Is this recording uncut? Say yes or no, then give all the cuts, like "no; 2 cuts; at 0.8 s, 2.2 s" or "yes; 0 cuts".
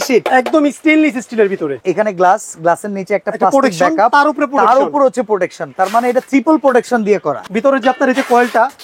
no; 2 cuts; at 1.8 s, 7.4 s